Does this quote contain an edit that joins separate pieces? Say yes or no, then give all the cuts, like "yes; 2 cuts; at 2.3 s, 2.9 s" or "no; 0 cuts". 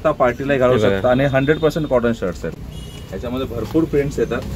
yes; 1 cut; at 2.5 s